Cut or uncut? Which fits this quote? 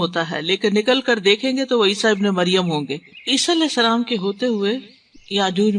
cut